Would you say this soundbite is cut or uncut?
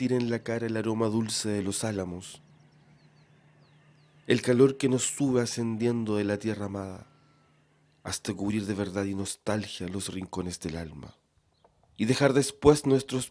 cut